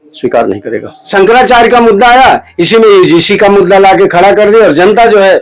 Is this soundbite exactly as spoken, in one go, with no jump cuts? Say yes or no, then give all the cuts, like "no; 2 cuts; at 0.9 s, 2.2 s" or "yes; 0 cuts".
no; 1 cut; at 1.1 s